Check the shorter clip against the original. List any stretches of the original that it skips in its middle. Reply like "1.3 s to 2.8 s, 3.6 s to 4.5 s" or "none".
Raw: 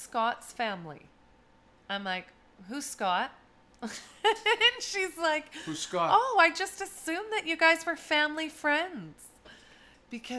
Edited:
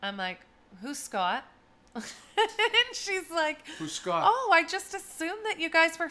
none